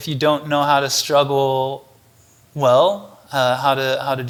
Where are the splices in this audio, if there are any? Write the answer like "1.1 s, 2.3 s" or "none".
none